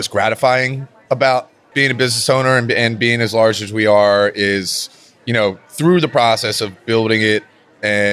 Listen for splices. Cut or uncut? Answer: cut